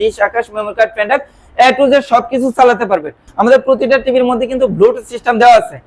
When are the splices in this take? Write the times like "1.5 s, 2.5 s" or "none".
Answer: 3.2 s